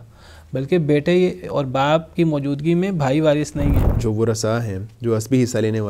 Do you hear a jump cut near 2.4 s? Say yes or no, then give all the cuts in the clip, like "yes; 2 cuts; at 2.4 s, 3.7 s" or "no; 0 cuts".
no; 1 cut; at 3.9 s